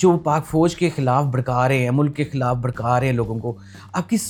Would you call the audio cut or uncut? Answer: uncut